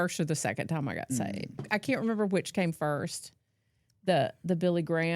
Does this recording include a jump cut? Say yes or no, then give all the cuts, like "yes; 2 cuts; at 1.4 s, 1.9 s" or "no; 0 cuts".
yes; 1 cut; at 1.6 s